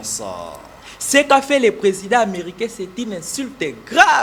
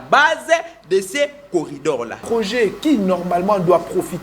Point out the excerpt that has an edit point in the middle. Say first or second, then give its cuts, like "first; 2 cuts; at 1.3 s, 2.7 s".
second; 1 cut; at 2.2 s